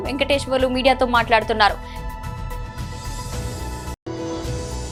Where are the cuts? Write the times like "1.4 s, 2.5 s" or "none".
none